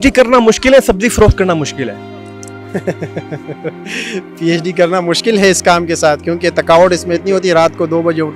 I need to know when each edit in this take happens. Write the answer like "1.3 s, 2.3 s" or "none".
none